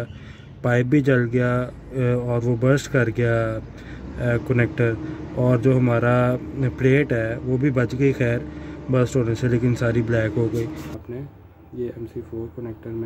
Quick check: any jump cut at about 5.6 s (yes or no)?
no